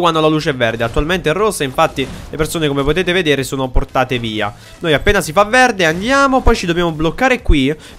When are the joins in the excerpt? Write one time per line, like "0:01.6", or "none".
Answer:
none